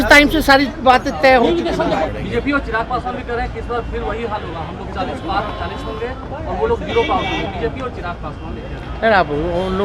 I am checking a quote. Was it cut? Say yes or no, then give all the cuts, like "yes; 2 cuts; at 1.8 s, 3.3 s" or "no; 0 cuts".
yes; 1 cut; at 2.1 s